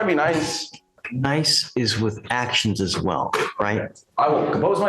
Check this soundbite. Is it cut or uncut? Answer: cut